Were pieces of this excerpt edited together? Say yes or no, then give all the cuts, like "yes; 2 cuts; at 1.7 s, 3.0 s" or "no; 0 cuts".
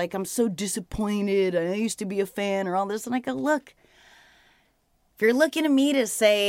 no; 0 cuts